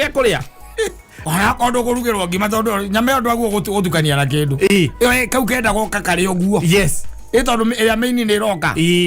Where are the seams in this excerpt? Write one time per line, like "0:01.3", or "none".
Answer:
0:01.1